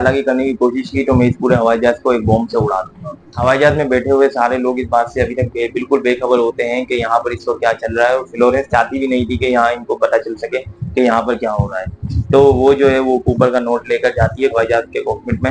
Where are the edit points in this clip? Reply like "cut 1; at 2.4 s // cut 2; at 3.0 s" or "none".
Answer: none